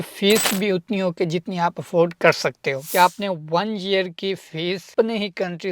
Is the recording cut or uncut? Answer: cut